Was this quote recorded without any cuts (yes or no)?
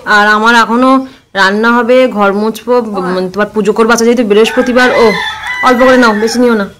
yes